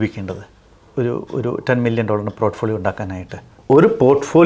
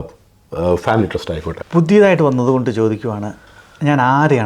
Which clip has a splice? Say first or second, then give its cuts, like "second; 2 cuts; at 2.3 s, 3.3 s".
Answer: second; 1 cut; at 1.6 s